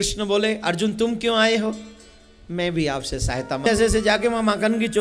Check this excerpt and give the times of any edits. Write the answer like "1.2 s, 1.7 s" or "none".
3.7 s